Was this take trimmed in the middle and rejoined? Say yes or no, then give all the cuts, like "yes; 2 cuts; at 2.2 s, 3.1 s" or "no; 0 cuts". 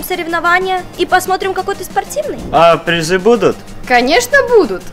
yes; 1 cut; at 2.4 s